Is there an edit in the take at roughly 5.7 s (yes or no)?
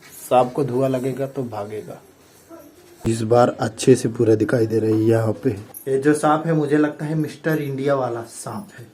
yes